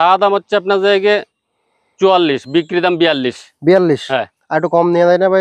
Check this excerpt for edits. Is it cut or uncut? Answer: uncut